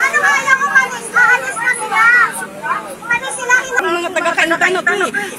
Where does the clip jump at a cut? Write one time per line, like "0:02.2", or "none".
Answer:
0:03.8